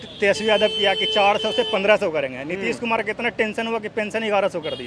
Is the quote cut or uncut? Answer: uncut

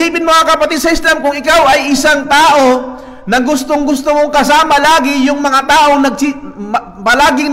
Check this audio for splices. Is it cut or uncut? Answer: uncut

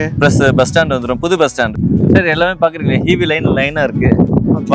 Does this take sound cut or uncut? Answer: cut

